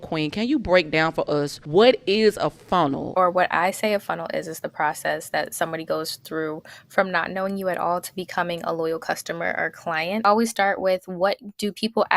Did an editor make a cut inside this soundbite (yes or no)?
yes